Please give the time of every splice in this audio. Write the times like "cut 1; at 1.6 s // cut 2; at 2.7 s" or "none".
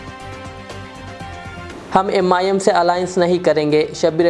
cut 1; at 1.7 s